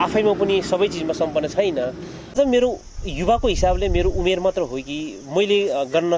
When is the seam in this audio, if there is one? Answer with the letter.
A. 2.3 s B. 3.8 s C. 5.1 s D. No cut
A